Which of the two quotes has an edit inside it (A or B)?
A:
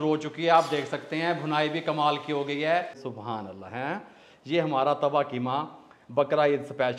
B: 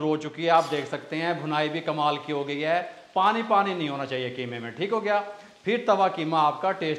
A